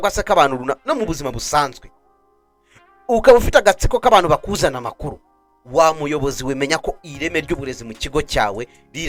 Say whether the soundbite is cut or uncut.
uncut